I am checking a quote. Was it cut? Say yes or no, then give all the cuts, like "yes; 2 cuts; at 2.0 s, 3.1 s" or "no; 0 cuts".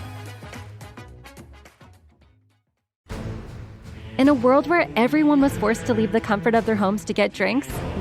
yes; 1 cut; at 2.9 s